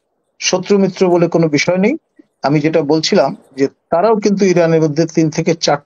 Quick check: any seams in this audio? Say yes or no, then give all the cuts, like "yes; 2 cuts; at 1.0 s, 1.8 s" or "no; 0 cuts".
no; 0 cuts